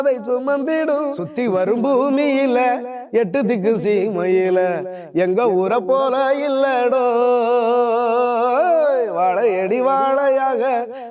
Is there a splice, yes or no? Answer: yes